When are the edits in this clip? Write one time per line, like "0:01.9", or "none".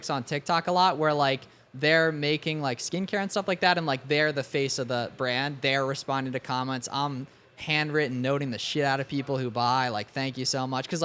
none